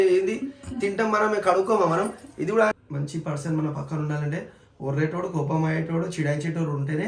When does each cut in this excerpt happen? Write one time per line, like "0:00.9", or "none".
0:02.8